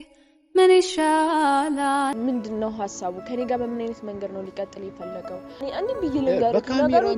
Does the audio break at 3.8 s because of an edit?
no; 2 cuts; at 2.1 s, 5.6 s

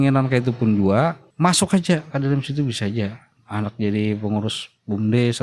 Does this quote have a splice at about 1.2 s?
yes; 2 cuts; at 1.2 s, 3.4 s

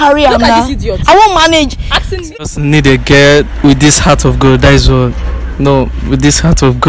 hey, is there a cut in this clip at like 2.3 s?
yes; 1 cut; at 2.3 s

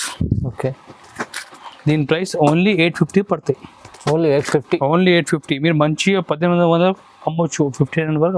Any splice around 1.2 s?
no; 0 cuts

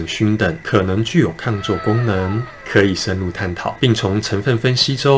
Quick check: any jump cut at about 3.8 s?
yes; 1 cut; at 3.8 s

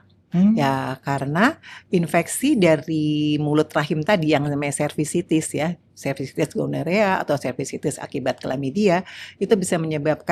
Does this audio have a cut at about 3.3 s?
no; 0 cuts

